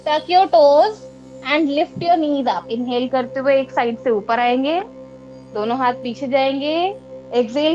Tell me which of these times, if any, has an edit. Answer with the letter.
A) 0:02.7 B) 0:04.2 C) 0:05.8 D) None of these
A